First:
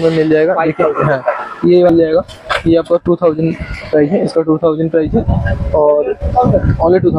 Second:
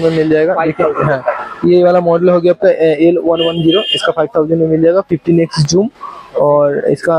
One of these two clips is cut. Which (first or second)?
first